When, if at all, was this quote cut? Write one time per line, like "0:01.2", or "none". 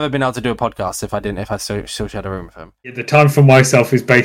0:02.9

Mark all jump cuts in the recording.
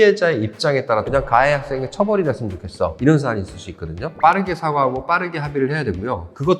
0:01.1
0:04.1

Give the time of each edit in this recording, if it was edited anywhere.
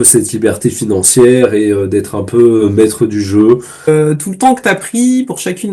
0:03.9

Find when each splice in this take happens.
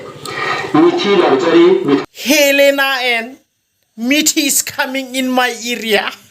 0:02.0

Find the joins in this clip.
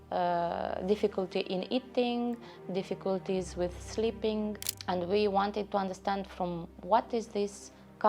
0:04.7

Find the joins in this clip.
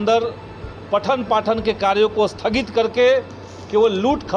none

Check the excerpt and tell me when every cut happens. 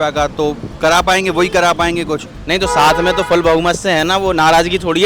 0:02.3

